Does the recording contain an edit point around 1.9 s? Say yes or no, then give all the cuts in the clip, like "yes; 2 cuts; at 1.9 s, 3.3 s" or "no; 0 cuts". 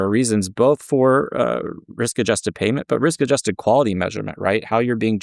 no; 0 cuts